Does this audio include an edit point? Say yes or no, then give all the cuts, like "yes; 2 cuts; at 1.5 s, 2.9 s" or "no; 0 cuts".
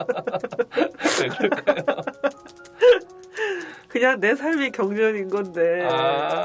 no; 0 cuts